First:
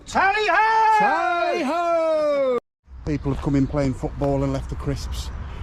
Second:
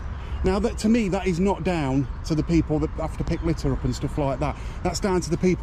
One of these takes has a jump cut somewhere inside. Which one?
first; 1 cut; at 2.6 s

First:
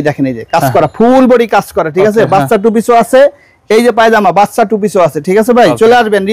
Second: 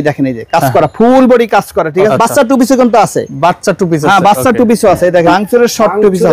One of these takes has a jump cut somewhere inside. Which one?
second; 2 cuts; at 2.1 s, 5.3 s

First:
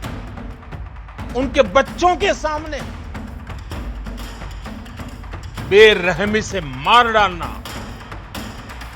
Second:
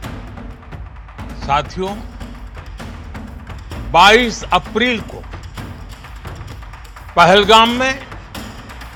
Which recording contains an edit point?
first; 2 cuts; at 1.3 s, 8.0 s

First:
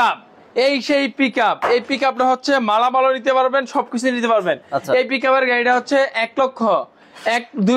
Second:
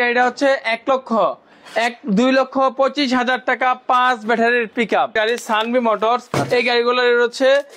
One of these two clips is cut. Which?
second; 1 cut; at 5.1 s

